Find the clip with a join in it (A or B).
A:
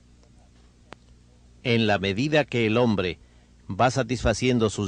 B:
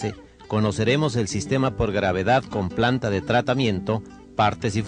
A